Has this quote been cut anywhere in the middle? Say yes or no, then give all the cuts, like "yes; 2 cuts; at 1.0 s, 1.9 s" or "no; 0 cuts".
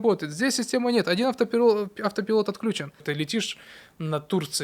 yes; 1 cut; at 3.0 s